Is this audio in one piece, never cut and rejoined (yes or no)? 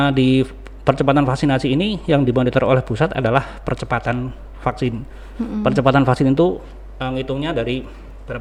yes